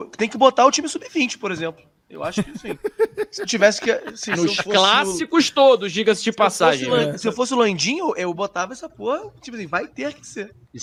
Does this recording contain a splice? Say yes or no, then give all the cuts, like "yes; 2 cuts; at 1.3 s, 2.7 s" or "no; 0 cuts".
no; 0 cuts